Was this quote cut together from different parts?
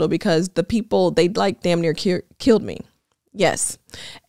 no; 0 cuts

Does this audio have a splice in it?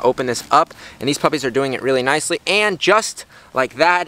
no; 0 cuts

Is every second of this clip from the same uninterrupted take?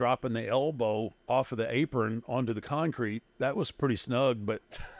no; 2 cuts; at 1.2 s, 3.2 s

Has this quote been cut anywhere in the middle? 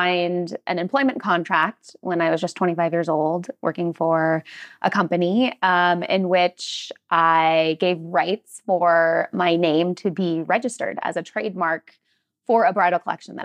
no; 0 cuts

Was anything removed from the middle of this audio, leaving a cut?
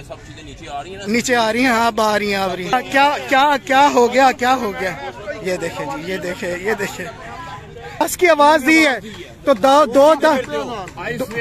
yes; 2 cuts; at 2.7 s, 8.0 s

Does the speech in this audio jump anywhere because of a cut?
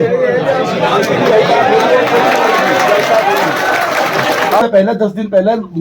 yes; 1 cut; at 4.6 s

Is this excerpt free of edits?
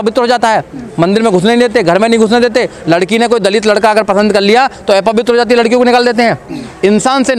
yes; 0 cuts

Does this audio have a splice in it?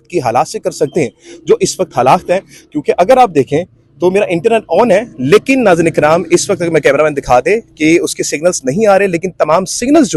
no; 0 cuts

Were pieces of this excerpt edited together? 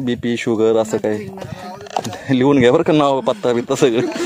no; 0 cuts

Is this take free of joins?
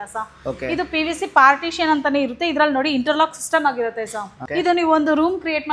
no; 1 cut; at 4.4 s

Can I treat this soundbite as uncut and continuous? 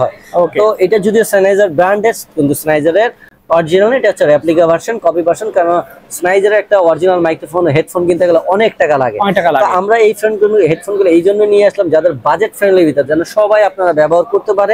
yes; 0 cuts

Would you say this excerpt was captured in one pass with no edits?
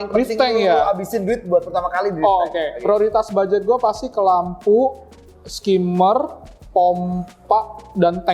yes; 0 cuts

